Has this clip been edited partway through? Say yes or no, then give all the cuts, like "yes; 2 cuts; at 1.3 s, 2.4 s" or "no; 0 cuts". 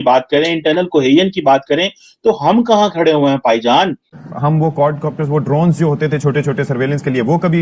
yes; 1 cut; at 4.2 s